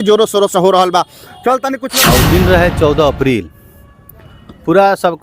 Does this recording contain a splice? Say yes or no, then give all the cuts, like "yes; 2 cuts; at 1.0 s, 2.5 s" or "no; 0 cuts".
yes; 1 cut; at 1.8 s